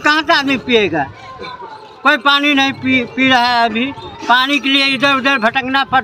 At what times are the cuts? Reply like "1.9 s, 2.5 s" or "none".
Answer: none